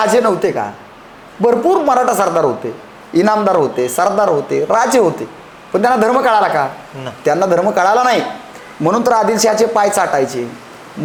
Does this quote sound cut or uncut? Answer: uncut